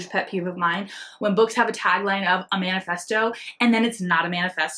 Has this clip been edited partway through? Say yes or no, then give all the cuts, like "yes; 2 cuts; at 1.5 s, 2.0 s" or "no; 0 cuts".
no; 0 cuts